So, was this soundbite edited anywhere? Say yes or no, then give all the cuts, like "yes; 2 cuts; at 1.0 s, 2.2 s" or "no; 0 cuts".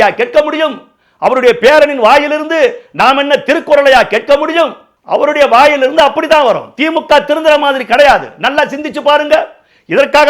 no; 0 cuts